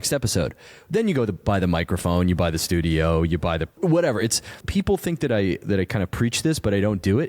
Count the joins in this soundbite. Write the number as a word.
two